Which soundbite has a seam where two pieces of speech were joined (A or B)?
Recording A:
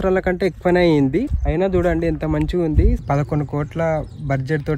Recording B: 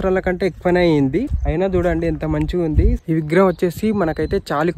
A